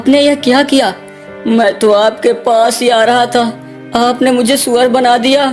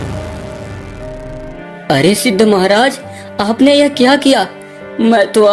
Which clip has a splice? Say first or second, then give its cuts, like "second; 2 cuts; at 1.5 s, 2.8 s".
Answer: second; 1 cut; at 1.6 s